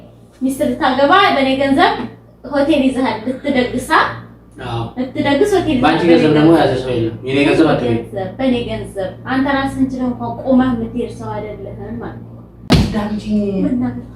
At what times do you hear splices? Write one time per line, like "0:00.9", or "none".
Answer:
0:12.6